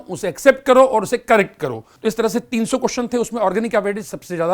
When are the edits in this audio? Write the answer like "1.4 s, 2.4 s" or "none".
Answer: 1.8 s